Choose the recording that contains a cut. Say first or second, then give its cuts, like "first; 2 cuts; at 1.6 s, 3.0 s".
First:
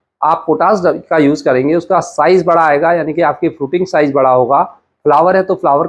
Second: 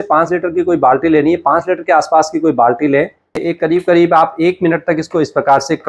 second; 1 cut; at 3.3 s